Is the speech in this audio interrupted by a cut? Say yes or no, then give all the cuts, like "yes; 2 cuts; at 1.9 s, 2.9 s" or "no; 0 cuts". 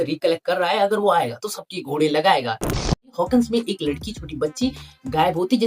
yes; 1 cut; at 2.9 s